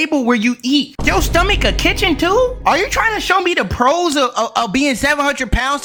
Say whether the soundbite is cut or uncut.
uncut